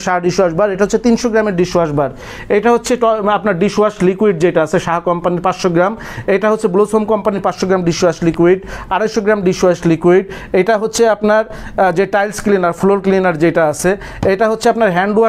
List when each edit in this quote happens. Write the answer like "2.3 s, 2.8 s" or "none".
none